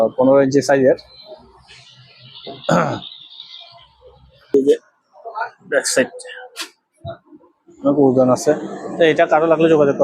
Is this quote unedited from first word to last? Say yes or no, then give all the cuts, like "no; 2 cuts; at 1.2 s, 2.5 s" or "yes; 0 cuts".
no; 1 cut; at 4.5 s